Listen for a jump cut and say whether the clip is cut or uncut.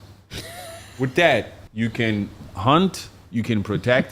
cut